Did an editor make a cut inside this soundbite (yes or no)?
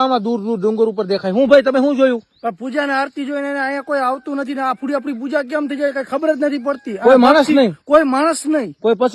no